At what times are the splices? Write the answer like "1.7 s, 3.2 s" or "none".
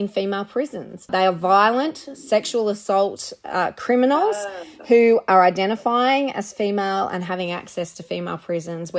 1.1 s